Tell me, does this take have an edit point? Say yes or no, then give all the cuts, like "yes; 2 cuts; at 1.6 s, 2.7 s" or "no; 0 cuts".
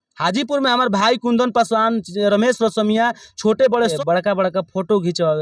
yes; 1 cut; at 3.9 s